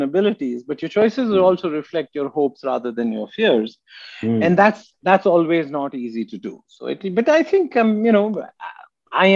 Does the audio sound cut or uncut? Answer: uncut